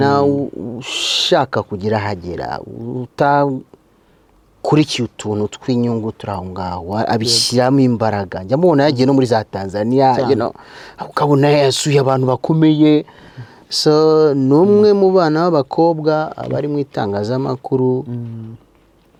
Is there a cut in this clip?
no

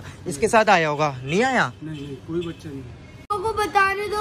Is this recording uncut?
no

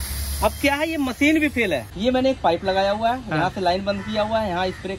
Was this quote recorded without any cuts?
yes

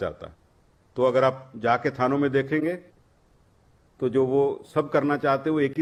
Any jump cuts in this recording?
no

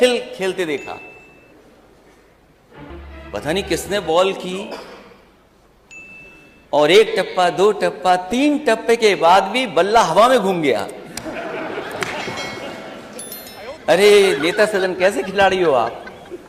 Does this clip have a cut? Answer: no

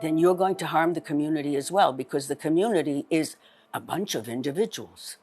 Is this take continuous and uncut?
no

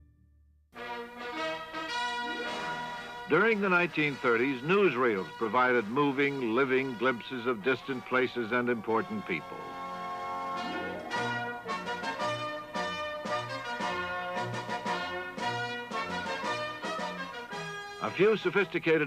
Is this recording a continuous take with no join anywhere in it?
no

